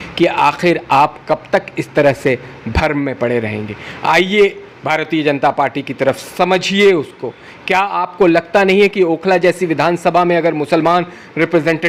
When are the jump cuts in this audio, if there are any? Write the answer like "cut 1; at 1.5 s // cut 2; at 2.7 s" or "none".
none